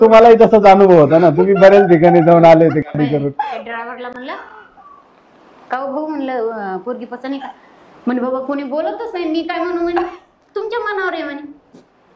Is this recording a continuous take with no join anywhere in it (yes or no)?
yes